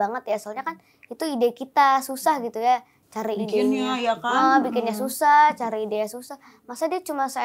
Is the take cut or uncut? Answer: uncut